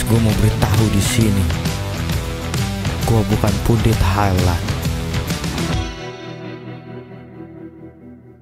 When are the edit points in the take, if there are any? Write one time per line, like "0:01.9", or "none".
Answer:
none